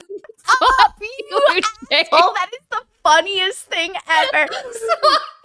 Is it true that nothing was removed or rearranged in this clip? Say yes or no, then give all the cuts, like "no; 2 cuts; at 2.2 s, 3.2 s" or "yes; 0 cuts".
yes; 0 cuts